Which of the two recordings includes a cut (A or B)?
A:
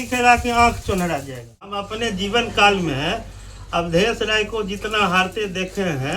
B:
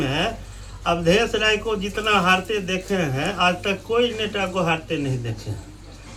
A